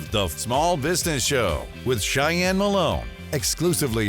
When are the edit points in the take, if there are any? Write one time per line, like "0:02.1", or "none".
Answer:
0:03.1